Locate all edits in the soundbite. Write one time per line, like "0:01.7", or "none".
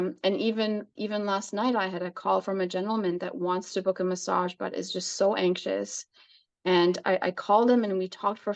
none